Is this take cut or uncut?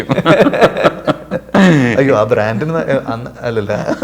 uncut